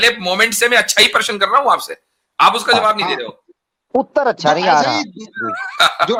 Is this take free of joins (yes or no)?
yes